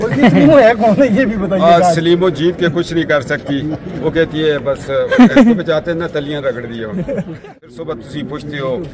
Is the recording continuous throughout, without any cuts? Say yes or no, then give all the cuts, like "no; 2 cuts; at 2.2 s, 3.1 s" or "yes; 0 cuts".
no; 1 cut; at 7.7 s